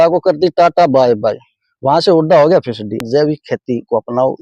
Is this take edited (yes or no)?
yes